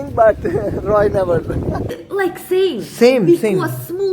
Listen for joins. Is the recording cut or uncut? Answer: cut